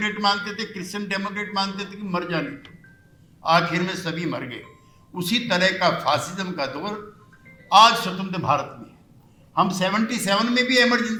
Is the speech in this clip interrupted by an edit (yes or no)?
no